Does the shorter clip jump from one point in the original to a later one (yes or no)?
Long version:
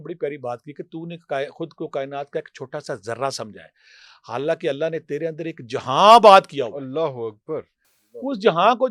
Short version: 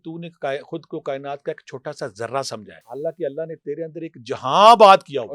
yes